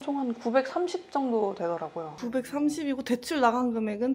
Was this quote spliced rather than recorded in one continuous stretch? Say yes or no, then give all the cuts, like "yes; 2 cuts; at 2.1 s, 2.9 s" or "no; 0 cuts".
no; 0 cuts